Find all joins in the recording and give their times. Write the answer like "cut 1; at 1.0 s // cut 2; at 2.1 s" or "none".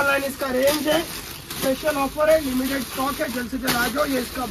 none